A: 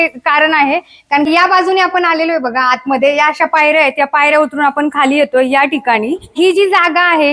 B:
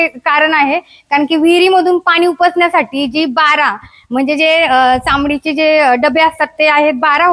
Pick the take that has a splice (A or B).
A